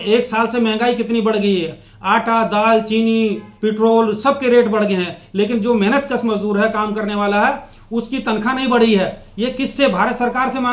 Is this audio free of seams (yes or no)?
yes